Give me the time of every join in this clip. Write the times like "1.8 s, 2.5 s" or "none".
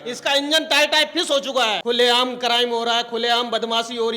1.8 s

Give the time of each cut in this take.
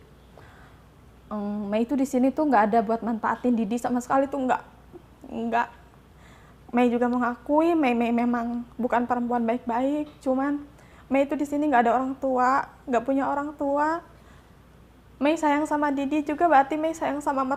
none

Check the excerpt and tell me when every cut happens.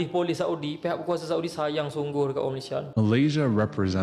2.9 s

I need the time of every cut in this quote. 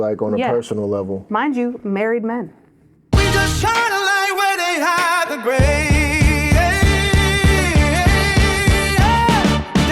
3.1 s

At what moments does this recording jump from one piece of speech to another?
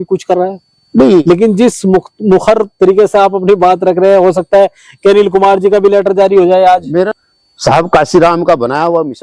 1.2 s, 7.1 s

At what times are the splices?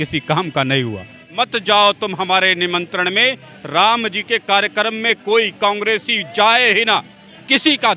1.3 s

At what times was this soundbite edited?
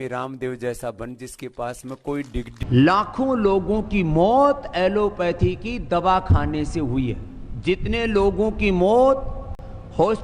2.5 s

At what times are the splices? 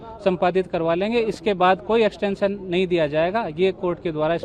none

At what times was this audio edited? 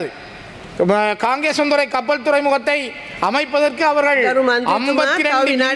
none

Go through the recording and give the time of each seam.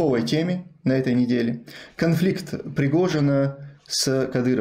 none

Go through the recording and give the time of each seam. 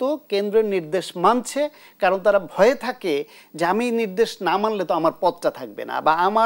none

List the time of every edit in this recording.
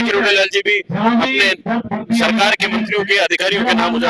none

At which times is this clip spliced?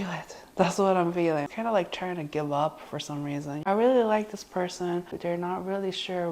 1.5 s, 3.6 s, 5.1 s

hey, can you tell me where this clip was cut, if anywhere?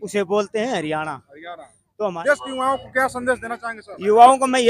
2.2 s

